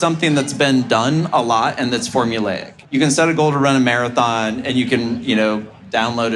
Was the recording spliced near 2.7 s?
yes; 1 cut; at 2.7 s

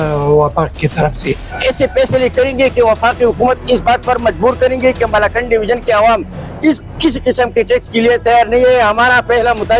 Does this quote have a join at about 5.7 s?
no; 1 cut; at 1.5 s

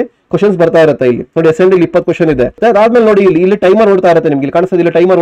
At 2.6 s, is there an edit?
yes; 1 cut; at 2.6 s

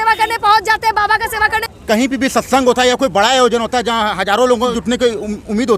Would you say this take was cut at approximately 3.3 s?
no; 2 cuts; at 1.7 s, 4.8 s

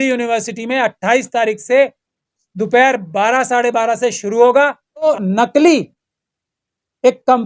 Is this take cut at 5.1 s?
yes; 1 cut; at 5.1 s

